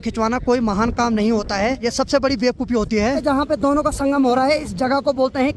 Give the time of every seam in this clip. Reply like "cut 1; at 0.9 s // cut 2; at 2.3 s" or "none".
cut 1; at 1.8 s // cut 2; at 3.2 s